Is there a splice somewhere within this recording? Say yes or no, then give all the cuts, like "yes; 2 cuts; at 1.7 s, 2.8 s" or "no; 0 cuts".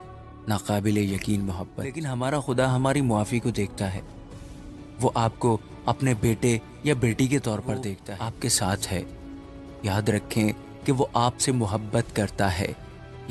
yes; 2 cuts; at 2.0 s, 8.0 s